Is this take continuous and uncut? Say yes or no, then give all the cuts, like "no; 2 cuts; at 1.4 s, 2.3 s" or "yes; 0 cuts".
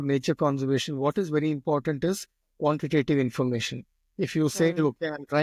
yes; 0 cuts